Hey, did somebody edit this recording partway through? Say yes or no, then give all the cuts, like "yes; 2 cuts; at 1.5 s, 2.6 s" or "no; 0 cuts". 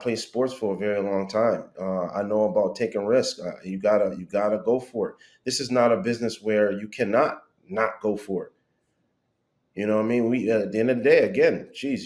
no; 0 cuts